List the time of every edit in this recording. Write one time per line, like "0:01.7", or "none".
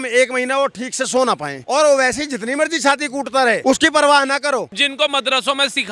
0:01.5
0:03.6
0:04.8